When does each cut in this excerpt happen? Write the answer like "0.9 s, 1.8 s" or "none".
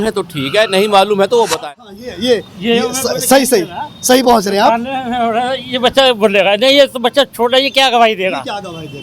1.5 s

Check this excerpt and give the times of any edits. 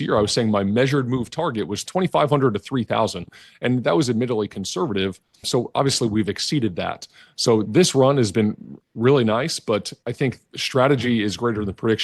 1.9 s, 5.5 s, 7.7 s, 10.0 s

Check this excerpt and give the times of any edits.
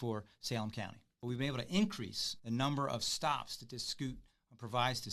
1.1 s, 2.3 s

